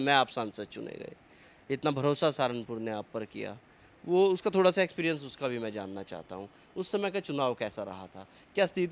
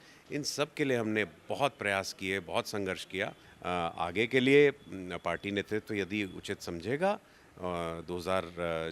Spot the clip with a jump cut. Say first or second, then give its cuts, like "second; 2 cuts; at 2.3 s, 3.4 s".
second; 1 cut; at 3.5 s